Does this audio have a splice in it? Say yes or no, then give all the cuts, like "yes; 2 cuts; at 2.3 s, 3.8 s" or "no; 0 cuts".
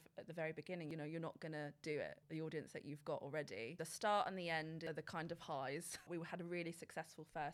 yes; 5 cuts; at 0.9 s, 2.2 s, 3.8 s, 4.8 s, 6.1 s